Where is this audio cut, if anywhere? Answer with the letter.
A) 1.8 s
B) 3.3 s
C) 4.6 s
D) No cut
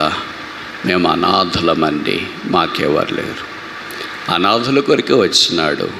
D